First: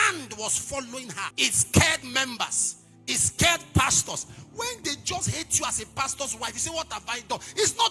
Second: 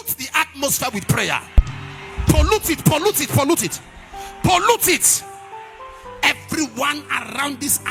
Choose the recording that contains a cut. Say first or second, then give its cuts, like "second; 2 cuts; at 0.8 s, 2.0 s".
first; 1 cut; at 1.3 s